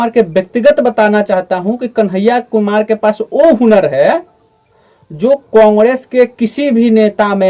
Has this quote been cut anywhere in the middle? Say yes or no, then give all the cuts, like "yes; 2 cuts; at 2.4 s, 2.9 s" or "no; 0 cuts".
no; 0 cuts